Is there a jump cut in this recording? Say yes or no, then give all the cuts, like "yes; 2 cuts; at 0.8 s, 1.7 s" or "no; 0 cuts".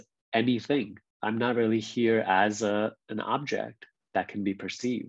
yes; 1 cut; at 1.0 s